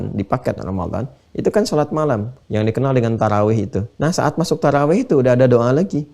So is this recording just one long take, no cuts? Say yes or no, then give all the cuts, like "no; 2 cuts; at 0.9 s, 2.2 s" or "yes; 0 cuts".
no; 2 cuts; at 2.3 s, 3.8 s